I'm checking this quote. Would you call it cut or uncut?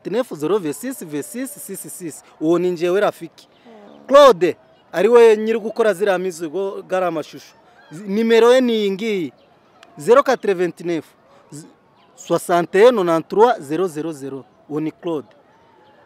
uncut